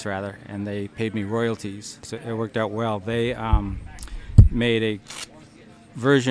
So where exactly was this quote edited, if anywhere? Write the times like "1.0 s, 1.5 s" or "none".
2.1 s